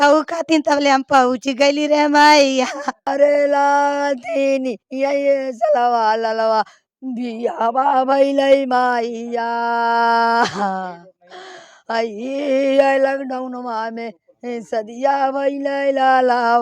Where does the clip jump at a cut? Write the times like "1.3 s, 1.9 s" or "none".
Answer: 3.1 s